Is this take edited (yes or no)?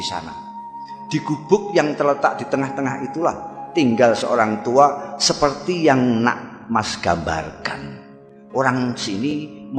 no